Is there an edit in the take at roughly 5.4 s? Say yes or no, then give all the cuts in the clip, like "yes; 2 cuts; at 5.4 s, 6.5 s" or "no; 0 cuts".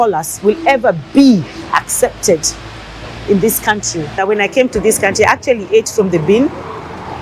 no; 1 cut; at 4.2 s